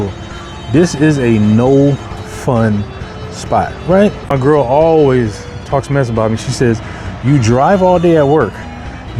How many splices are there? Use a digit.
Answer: 1